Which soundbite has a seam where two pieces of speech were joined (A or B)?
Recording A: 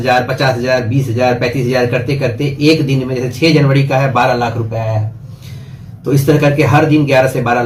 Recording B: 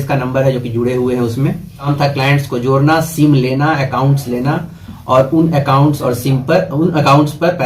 B